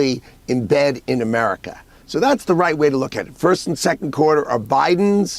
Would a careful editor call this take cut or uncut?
cut